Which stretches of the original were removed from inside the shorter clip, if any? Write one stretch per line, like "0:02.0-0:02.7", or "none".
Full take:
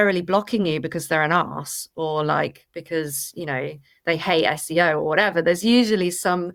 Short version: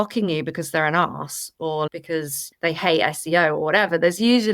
0:02.2-0:03.3